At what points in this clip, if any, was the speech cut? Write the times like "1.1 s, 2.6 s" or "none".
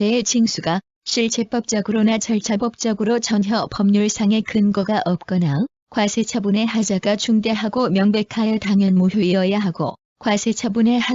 10.0 s

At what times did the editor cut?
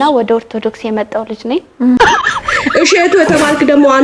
2.0 s

